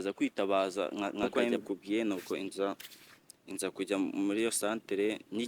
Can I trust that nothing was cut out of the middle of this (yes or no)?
no